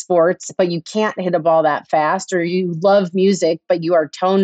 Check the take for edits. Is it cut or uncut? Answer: uncut